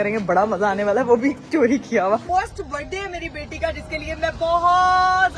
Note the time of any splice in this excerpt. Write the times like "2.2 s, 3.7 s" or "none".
2.2 s